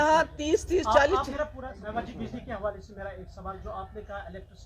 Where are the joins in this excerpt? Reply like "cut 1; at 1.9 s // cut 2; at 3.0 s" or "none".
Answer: cut 1; at 1.7 s